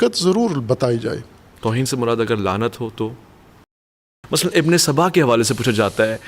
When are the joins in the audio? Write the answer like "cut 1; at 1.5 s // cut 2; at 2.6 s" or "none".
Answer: cut 1; at 3.9 s